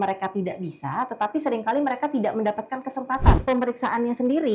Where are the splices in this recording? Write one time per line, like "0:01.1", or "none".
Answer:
0:03.4